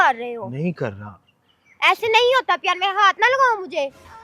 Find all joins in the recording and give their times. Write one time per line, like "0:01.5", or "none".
none

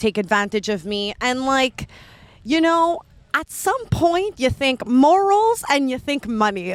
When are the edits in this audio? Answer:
none

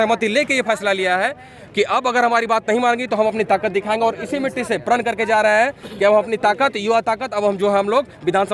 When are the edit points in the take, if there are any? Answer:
none

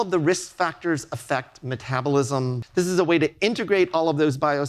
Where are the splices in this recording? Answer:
0:02.6

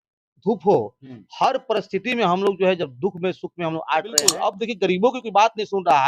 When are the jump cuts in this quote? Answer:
0:04.4

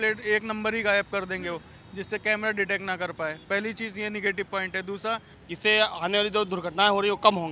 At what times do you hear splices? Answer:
0:05.3

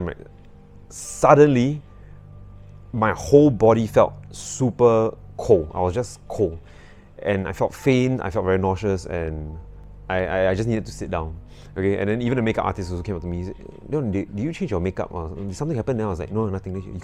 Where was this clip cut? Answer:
none

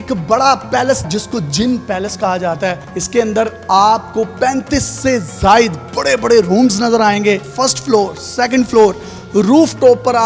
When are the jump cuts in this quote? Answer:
0:01.0
0:02.9

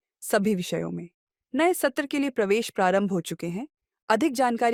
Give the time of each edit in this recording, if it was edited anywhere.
none

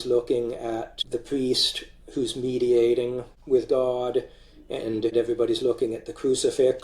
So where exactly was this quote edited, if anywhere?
0:01.0
0:03.3
0:05.1

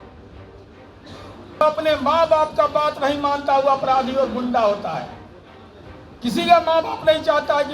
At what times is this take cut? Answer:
0:01.6

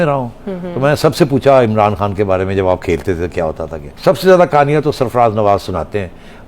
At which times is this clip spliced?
0:03.9

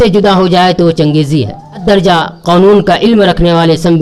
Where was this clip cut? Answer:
0:01.8

